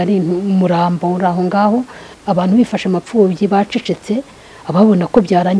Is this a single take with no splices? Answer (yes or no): no